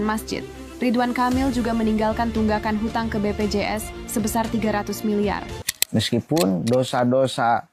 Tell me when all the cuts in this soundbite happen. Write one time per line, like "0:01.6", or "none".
0:05.7